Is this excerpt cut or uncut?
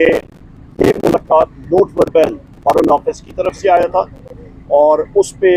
uncut